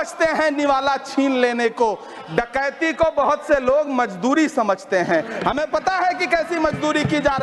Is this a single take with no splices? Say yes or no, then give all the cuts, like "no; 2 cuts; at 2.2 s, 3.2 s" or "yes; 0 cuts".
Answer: yes; 0 cuts